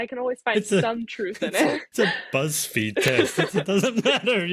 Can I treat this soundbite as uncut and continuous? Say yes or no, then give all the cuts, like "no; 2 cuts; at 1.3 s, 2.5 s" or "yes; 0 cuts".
no; 1 cut; at 1.9 s